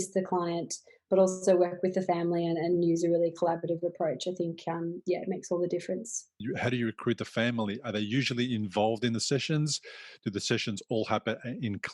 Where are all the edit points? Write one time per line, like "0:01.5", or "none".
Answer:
0:06.4

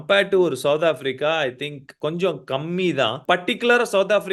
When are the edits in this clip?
0:01.9
0:03.2

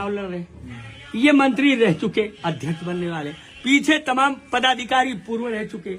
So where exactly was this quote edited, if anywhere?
none

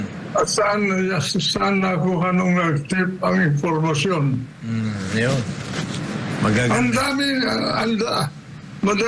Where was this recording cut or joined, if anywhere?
none

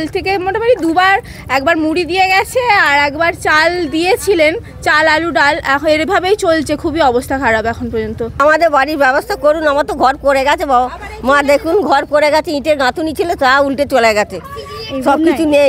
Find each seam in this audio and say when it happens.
0:08.4

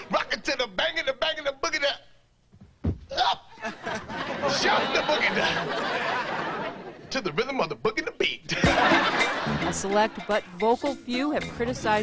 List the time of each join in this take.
0:06.5

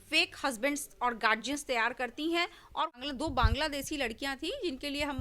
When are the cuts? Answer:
0:03.0

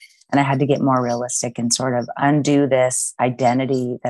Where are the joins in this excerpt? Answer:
none

